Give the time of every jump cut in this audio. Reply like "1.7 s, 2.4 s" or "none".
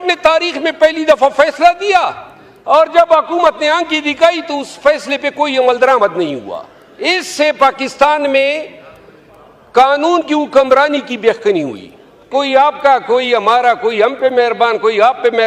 12.3 s